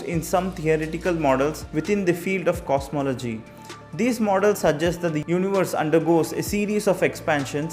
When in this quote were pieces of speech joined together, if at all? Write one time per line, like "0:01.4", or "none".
none